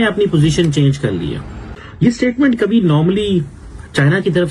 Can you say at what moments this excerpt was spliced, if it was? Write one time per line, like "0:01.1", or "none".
0:01.5